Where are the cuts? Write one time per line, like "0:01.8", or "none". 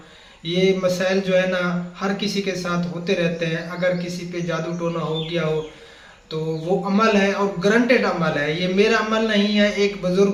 none